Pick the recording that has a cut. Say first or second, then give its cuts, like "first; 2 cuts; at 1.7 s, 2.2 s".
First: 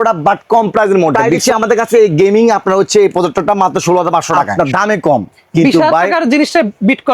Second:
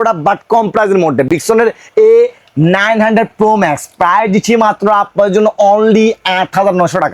first; 2 cuts; at 1.3 s, 4.5 s